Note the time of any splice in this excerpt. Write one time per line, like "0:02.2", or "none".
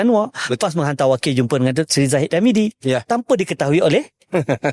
none